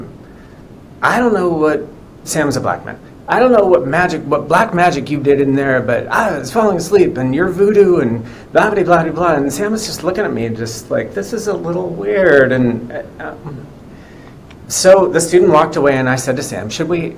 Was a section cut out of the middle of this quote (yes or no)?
no